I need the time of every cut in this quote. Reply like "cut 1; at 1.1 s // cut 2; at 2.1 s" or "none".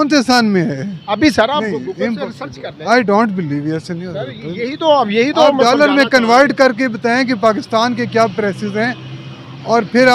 none